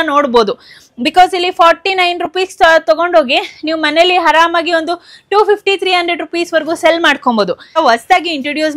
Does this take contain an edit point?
yes; 1 cut; at 7.8 s

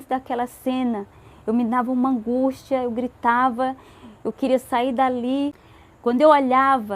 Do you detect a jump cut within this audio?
yes; 1 cut; at 5.6 s

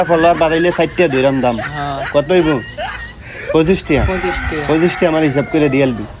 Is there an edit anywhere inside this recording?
no; 0 cuts

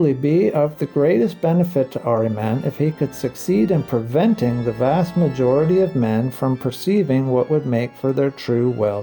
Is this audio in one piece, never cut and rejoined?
yes; 0 cuts

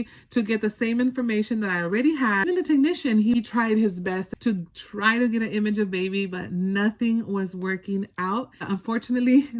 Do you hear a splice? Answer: yes; 4 cuts; at 2.5 s, 3.3 s, 4.3 s, 8.6 s

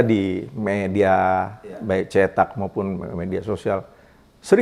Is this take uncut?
yes; 0 cuts

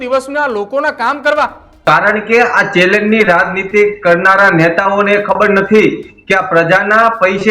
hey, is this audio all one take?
no; 1 cut; at 1.7 s

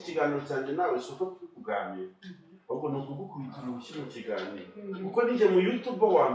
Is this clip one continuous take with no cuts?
yes; 0 cuts

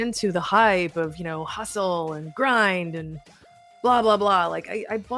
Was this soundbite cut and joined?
no; 0 cuts

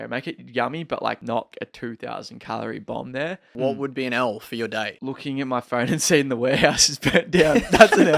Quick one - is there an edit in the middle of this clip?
yes; 3 cuts; at 1.5 s, 3.5 s, 5.0 s

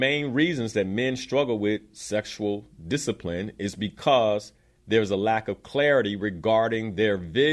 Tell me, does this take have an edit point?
no; 0 cuts

